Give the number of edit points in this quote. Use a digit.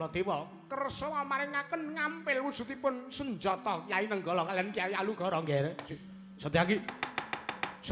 1